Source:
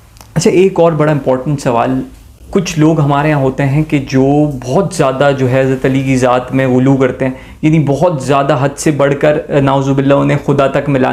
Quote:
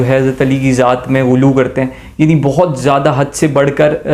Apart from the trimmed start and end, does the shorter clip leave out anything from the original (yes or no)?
no